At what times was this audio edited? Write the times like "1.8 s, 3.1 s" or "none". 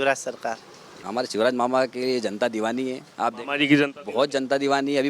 1.0 s